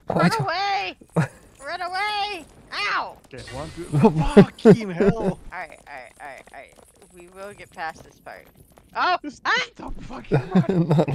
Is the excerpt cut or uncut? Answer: cut